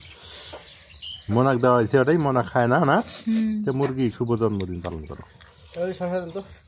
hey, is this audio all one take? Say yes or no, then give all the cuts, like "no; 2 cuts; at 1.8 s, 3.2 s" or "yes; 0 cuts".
yes; 0 cuts